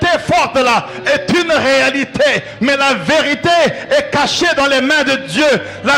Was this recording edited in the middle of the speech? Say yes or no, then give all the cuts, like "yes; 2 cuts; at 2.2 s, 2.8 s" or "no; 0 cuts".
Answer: no; 0 cuts